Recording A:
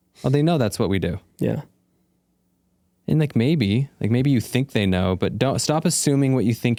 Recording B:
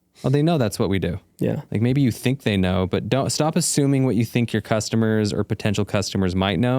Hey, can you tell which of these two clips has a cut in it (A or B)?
B